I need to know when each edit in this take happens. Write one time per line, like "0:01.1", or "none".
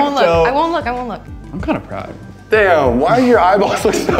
0:01.3
0:02.3

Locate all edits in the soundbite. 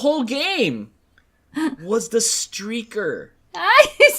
none

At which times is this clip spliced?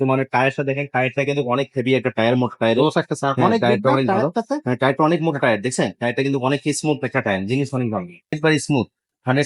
0:08.4

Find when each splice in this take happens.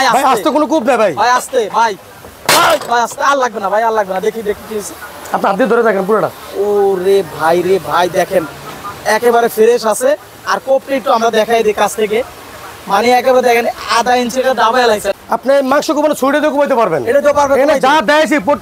0:15.1

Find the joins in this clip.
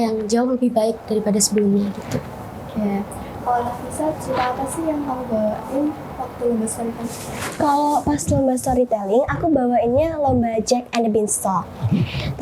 none

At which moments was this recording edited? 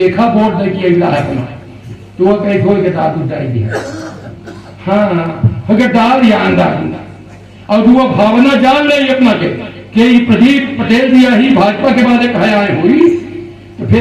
none

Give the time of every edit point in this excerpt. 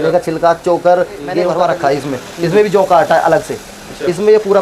0:01.5

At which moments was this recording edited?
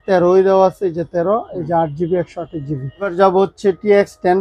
0:03.1

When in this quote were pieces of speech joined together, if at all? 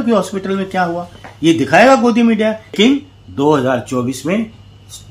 0:02.7

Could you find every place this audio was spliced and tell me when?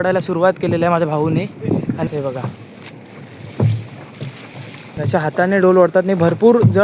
0:02.1
0:05.0

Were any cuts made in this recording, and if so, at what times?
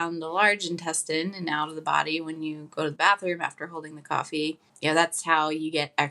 0:04.7

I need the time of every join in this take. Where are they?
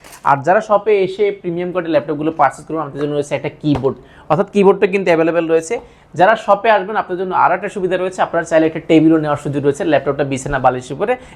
none

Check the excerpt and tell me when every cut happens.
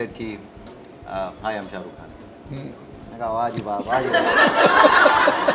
none

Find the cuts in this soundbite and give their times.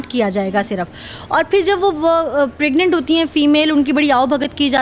none

